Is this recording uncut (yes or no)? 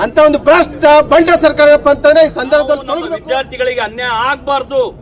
no